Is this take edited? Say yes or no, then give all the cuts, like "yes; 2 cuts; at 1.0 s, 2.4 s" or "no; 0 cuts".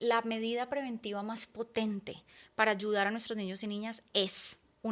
no; 0 cuts